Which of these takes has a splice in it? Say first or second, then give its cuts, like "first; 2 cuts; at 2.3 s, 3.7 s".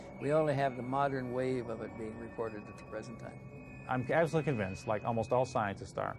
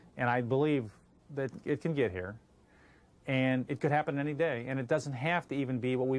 first; 1 cut; at 3.1 s